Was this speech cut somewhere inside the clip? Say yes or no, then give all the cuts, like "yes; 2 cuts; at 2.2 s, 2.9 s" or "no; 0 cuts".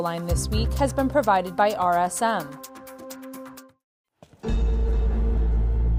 yes; 2 cuts; at 2.5 s, 3.6 s